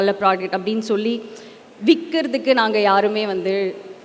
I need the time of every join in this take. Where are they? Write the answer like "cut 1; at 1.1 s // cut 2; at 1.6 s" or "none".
none